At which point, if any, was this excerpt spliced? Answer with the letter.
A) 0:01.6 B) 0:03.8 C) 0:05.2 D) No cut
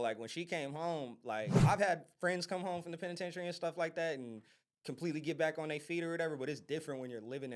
A